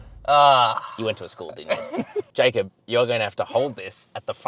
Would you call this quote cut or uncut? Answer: cut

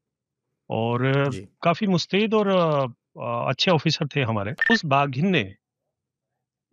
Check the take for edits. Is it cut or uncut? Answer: cut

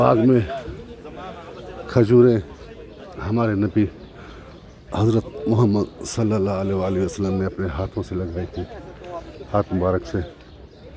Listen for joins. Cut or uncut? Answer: uncut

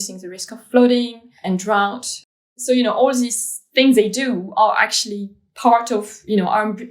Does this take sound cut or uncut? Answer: cut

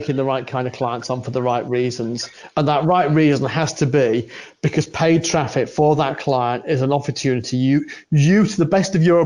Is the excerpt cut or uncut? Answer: uncut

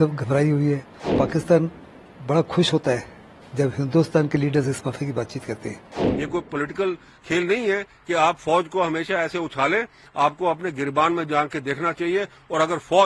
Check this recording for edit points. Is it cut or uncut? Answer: cut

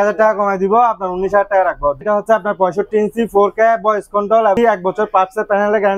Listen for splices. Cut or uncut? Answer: cut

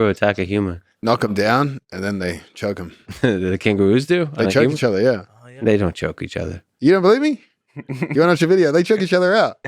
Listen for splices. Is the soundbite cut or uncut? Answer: cut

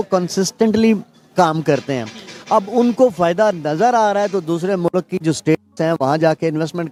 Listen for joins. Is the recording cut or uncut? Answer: uncut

